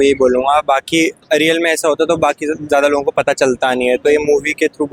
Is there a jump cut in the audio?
no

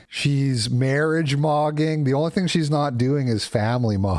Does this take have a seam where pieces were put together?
no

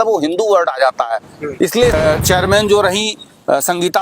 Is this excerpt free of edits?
no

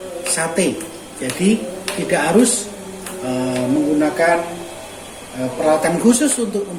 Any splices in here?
no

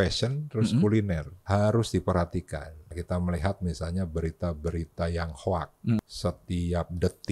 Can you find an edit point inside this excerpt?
yes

